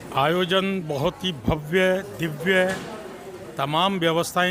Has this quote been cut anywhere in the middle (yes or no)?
no